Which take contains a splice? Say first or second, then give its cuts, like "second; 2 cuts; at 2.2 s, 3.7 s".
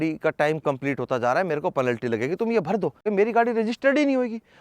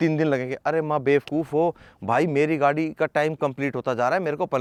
first; 1 cut; at 3.0 s